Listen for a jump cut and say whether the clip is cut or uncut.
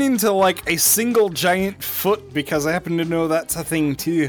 uncut